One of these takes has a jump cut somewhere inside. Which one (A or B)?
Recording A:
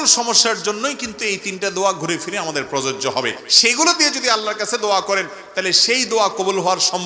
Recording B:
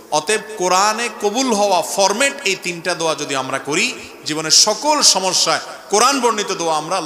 A